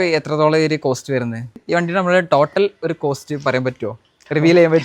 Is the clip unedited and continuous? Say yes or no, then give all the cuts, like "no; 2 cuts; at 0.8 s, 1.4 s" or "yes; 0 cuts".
no; 1 cut; at 1.6 s